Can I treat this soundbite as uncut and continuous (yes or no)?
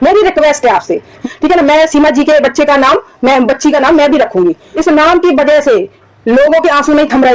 no